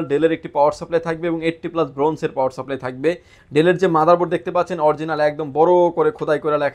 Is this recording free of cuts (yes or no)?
yes